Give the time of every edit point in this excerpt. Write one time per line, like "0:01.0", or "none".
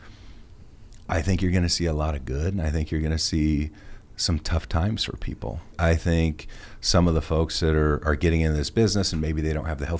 0:05.7